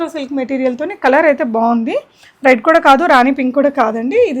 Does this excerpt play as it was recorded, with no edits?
yes; 0 cuts

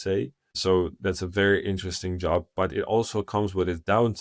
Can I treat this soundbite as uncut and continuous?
yes; 0 cuts

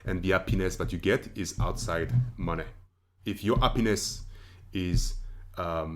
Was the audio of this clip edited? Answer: yes; 1 cut; at 3.0 s

